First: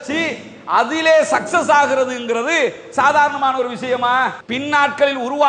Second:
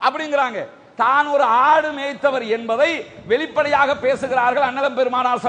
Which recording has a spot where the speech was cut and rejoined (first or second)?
first